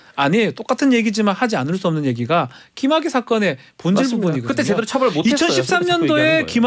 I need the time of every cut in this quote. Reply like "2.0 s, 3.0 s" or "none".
none